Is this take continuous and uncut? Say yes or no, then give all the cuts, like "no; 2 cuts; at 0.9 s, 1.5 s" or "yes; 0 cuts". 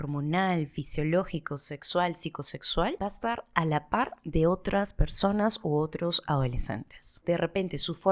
no; 2 cuts; at 3.0 s, 7.2 s